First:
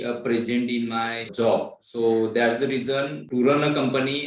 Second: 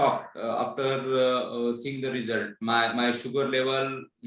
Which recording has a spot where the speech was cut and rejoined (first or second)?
first